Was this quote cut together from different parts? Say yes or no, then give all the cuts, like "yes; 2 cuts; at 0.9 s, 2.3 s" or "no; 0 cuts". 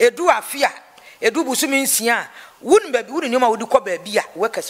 no; 0 cuts